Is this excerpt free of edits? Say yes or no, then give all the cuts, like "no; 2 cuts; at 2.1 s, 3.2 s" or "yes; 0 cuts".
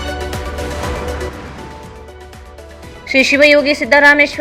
yes; 0 cuts